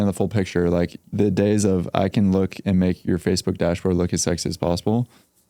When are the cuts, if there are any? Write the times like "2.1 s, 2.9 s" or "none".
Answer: 1.0 s